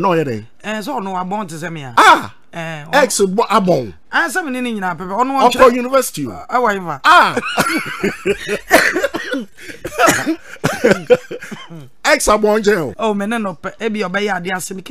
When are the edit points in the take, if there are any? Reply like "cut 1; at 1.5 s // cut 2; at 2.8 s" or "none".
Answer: cut 1; at 1.8 s // cut 2; at 6.9 s // cut 3; at 12.9 s